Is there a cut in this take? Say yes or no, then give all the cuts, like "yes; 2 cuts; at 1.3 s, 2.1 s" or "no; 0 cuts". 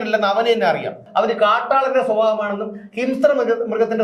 yes; 1 cut; at 1.0 s